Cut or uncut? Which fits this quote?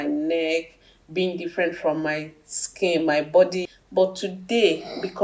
cut